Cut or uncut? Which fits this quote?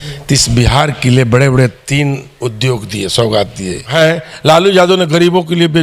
cut